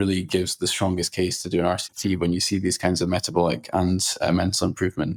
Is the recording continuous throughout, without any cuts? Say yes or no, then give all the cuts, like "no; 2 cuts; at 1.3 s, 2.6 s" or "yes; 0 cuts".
yes; 0 cuts